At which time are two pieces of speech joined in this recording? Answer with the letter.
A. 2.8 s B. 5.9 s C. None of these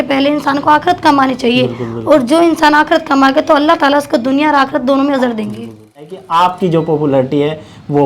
B